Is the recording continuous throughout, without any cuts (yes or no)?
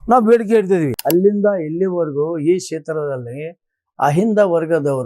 no